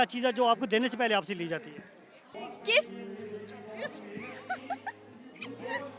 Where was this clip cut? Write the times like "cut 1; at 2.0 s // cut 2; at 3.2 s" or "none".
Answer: cut 1; at 2.3 s